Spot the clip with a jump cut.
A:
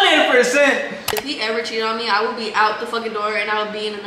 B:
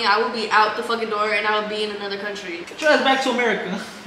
A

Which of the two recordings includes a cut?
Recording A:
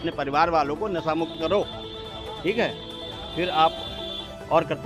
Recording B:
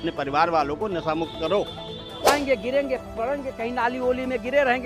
B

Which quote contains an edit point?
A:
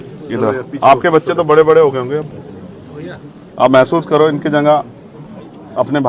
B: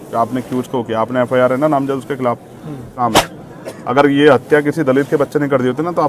B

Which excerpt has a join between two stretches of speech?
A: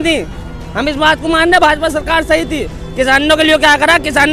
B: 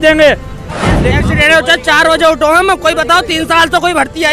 B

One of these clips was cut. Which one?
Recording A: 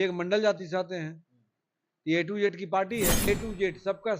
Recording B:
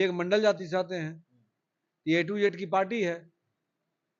A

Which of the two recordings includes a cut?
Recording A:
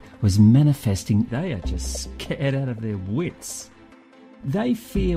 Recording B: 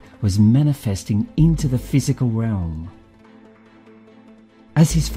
B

